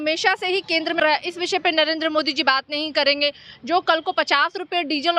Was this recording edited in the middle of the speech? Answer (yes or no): yes